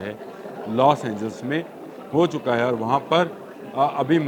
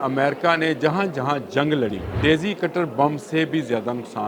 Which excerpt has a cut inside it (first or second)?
second